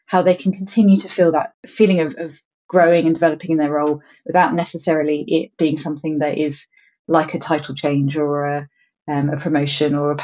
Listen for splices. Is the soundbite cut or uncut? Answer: cut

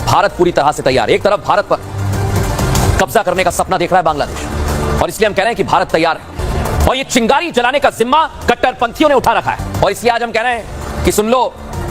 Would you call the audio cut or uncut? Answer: cut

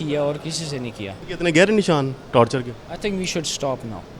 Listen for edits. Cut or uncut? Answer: cut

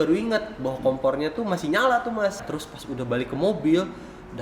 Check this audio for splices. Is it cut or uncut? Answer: cut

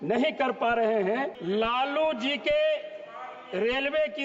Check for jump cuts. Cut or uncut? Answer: cut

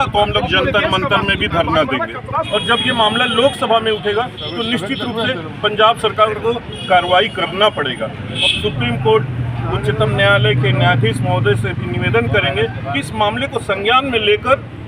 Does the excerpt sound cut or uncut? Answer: cut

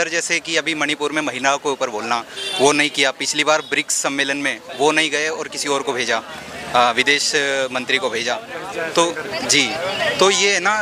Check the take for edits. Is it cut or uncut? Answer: uncut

